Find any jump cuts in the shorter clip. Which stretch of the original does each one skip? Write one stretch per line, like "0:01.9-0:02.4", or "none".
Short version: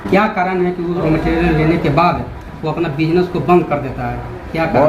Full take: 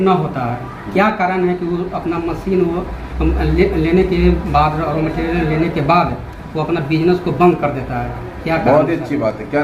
0:01.8-0:04.9